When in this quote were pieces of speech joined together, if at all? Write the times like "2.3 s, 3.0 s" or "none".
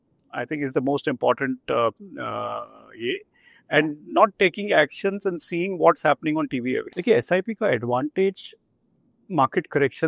6.9 s